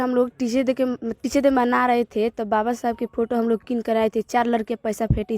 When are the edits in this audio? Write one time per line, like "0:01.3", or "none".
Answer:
0:01.1